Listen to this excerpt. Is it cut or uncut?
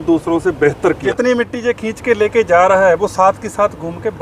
cut